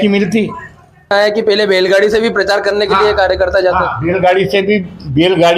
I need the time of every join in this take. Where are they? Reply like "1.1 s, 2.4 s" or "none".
1.1 s